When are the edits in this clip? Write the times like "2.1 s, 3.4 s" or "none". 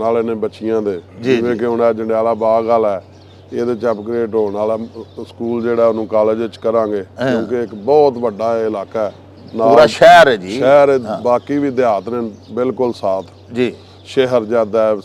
none